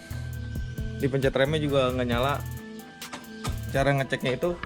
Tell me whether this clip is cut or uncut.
cut